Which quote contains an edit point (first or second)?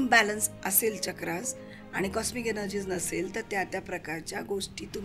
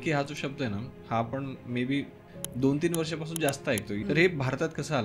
second